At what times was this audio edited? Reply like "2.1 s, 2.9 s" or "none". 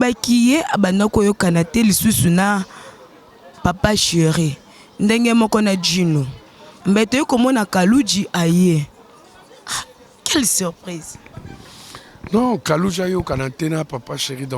none